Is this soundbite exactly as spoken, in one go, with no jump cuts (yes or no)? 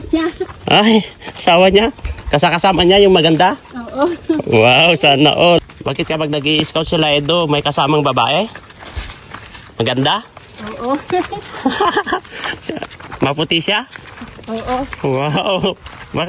no